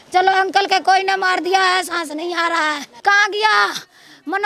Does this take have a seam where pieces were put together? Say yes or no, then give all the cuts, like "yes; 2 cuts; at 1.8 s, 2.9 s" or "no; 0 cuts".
yes; 1 cut; at 2.9 s